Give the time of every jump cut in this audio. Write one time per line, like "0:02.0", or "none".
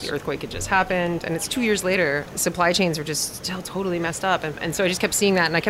0:02.3
0:04.6